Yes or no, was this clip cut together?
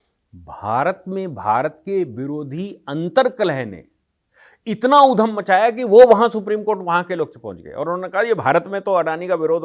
no